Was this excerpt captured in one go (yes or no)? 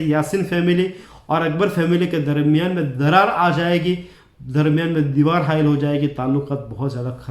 yes